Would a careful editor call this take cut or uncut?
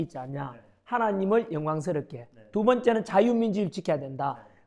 uncut